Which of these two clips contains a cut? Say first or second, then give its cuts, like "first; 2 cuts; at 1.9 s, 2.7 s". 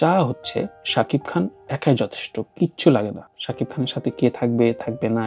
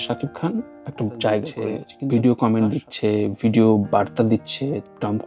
second; 1 cut; at 1.9 s